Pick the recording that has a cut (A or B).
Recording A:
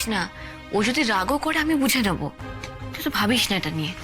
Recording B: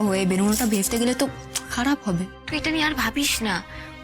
B